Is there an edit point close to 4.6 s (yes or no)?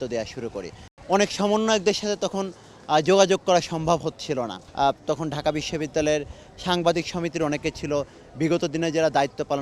yes